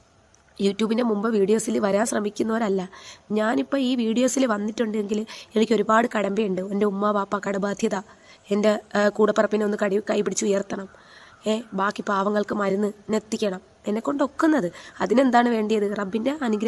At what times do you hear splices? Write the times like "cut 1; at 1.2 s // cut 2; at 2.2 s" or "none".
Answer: none